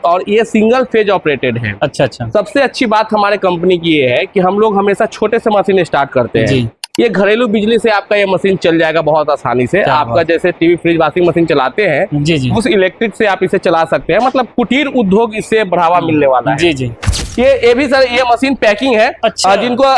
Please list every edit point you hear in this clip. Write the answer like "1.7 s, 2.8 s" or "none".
17.1 s